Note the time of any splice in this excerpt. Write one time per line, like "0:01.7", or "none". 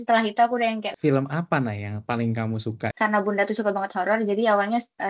0:00.9
0:02.9